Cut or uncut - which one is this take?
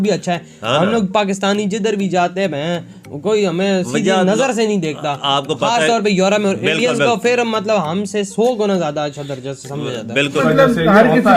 cut